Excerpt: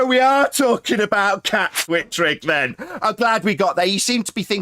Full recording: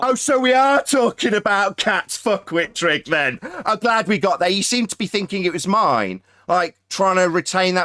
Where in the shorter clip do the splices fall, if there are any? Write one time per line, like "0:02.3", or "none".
0:01.8